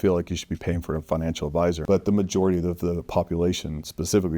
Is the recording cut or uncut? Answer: cut